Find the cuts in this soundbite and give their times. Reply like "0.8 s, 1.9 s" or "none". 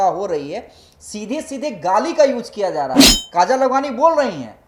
none